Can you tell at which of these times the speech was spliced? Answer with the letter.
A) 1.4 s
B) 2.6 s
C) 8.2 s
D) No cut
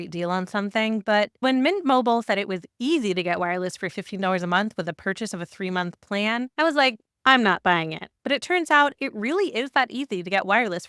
A